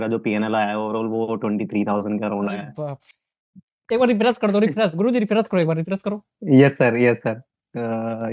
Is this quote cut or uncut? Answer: uncut